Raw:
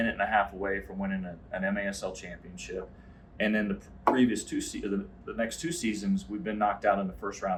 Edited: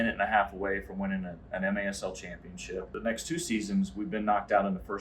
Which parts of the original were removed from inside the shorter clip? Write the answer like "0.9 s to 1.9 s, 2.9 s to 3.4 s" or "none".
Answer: 2.9 s to 5.2 s